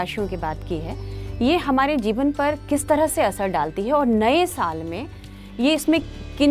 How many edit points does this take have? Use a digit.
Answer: 0